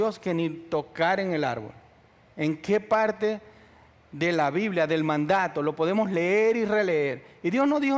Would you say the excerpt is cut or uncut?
uncut